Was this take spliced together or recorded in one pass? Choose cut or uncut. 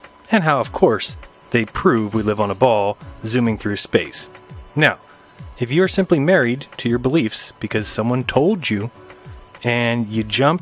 cut